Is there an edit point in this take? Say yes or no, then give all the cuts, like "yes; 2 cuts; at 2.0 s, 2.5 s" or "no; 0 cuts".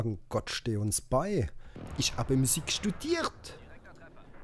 yes; 1 cut; at 1.9 s